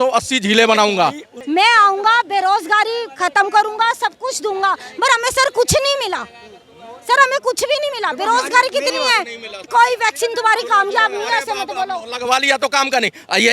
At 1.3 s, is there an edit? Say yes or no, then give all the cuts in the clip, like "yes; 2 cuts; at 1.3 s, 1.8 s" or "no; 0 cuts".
yes; 2 cuts; at 1.3 s, 9.6 s